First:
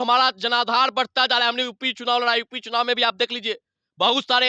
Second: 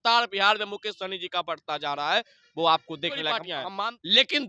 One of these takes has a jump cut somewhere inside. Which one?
second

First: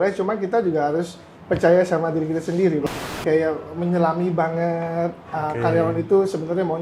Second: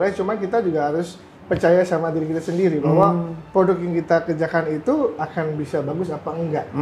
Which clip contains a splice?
first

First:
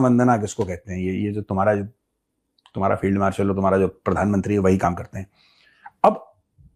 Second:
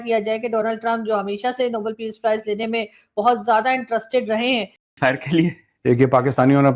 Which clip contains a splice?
second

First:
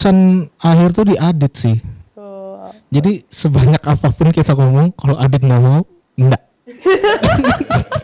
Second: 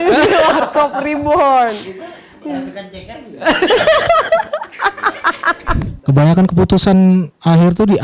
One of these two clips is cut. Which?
second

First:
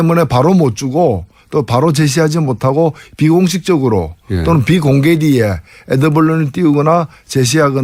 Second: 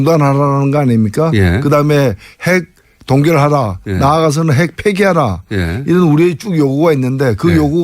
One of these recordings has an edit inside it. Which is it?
second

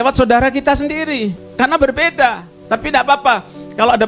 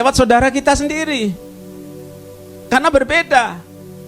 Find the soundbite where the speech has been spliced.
first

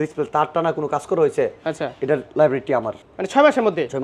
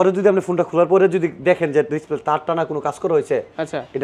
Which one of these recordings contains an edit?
first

